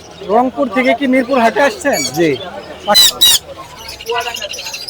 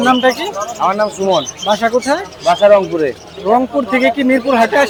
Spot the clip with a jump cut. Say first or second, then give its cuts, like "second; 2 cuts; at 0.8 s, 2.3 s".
first; 1 cut; at 3.0 s